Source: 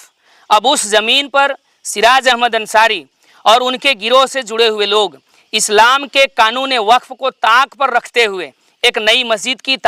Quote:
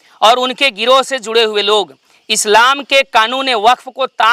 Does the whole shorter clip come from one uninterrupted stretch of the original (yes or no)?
yes